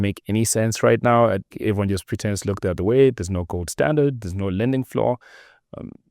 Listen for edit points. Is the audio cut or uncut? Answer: cut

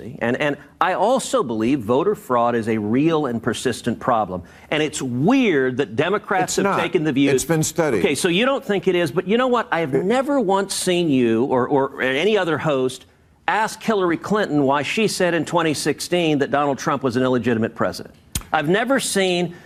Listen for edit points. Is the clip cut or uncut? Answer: uncut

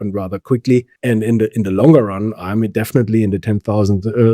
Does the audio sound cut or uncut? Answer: cut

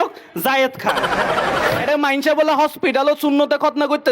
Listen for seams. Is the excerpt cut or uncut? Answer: cut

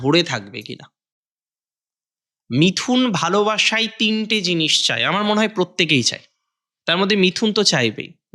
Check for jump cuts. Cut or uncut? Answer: uncut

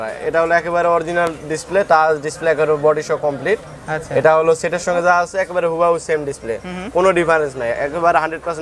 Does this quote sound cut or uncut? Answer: uncut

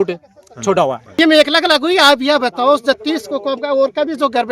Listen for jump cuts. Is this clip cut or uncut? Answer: cut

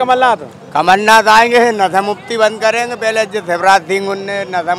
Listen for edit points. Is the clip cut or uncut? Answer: uncut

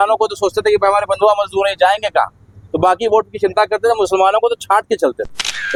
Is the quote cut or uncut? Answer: uncut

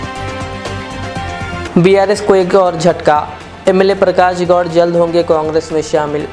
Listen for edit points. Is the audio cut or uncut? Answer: uncut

